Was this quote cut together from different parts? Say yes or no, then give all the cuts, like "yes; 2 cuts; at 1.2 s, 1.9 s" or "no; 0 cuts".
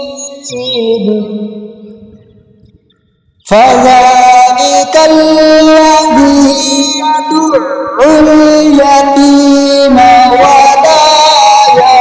no; 0 cuts